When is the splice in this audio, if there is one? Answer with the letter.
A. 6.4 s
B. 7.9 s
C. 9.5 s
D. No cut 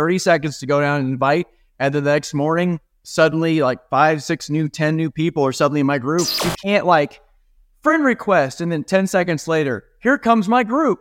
A